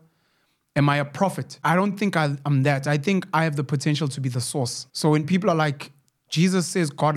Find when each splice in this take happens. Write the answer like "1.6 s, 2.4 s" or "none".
1.6 s, 4.8 s